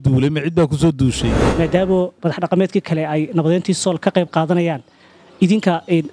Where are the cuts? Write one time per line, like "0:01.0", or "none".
0:01.5